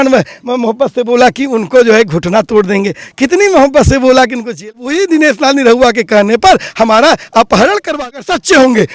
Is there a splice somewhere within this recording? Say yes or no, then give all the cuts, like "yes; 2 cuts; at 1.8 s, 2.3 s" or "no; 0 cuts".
yes; 2 cuts; at 4.8 s, 7.9 s